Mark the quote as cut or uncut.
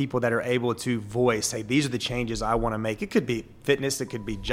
uncut